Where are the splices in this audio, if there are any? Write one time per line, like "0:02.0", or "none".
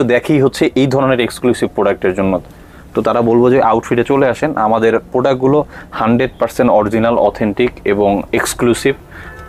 none

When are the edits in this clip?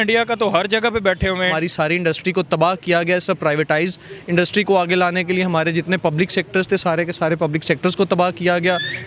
0:01.5

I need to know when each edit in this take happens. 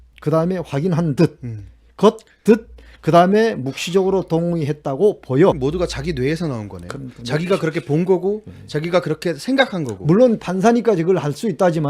0:05.6

